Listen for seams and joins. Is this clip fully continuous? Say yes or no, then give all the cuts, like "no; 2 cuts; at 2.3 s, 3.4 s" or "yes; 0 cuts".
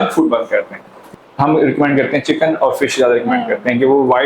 no; 1 cut; at 0.9 s